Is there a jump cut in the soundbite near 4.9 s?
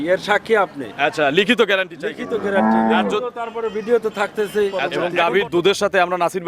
yes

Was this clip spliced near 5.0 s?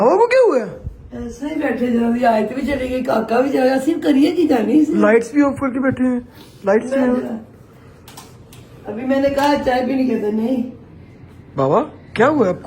no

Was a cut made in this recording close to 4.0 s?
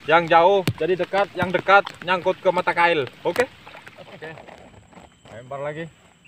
yes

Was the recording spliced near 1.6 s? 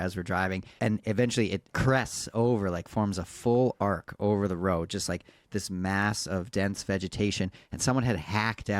yes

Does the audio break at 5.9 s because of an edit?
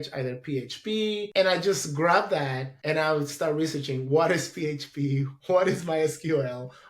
no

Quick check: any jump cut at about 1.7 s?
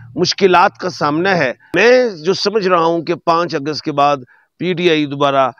yes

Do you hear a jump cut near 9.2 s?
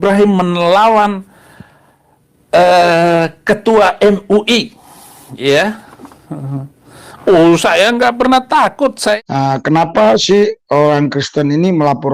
yes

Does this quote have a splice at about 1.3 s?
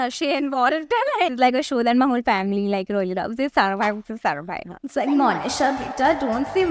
yes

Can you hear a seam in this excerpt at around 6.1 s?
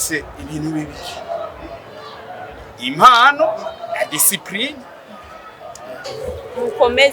yes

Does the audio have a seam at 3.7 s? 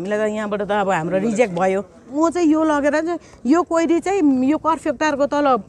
no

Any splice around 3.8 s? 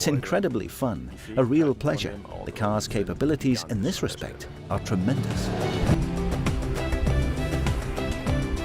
no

